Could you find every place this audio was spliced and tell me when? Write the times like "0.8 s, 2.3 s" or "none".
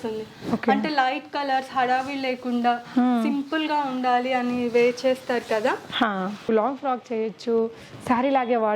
6.5 s